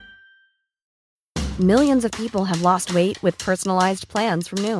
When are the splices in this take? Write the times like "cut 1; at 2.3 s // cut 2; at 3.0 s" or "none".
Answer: cut 1; at 1.0 s